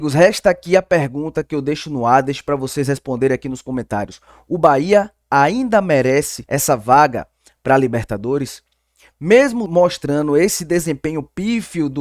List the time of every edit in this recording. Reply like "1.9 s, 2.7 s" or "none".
6.4 s, 9.6 s